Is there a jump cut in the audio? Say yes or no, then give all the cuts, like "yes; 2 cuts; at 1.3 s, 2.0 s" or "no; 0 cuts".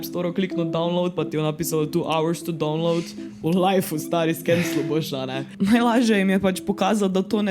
yes; 1 cut; at 5.5 s